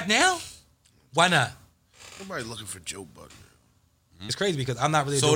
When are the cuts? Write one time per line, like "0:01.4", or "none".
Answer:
0:04.2